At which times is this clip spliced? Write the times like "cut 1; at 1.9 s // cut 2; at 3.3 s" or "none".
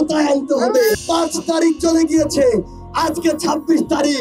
cut 1; at 0.9 s